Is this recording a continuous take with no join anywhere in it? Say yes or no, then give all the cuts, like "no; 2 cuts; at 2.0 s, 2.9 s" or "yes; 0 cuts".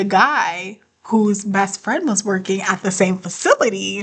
yes; 0 cuts